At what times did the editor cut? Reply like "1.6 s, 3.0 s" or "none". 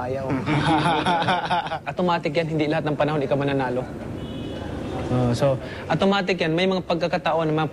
5.5 s